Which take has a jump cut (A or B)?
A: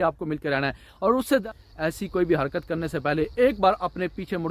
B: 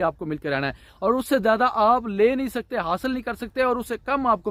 A